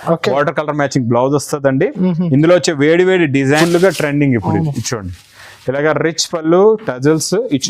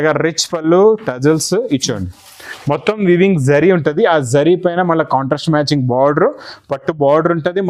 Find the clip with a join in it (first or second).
first